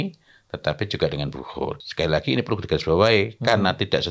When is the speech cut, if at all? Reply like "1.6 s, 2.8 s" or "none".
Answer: 1.7 s